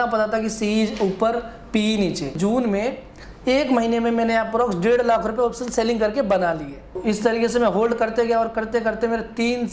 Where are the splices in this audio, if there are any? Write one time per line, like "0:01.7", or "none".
0:02.4
0:07.0